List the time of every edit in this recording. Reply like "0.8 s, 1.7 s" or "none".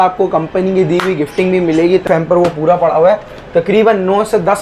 2.1 s